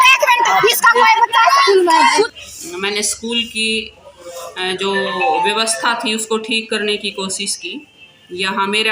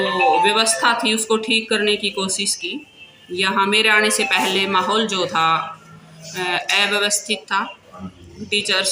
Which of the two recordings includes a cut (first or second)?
first